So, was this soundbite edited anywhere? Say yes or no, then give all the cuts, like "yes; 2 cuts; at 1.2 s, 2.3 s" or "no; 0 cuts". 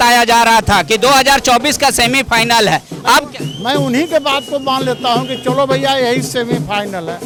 no; 0 cuts